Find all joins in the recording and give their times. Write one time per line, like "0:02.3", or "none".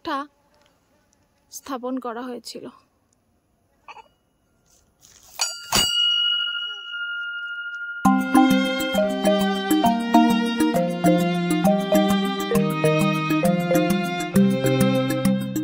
none